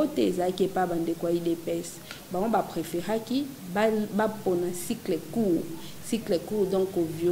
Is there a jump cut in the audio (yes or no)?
no